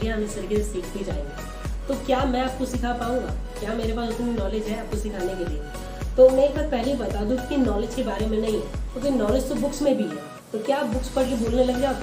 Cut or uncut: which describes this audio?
uncut